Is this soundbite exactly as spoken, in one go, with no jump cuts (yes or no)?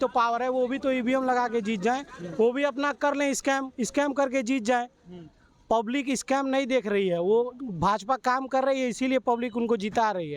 yes